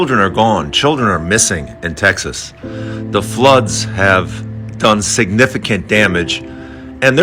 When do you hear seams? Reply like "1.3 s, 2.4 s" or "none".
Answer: none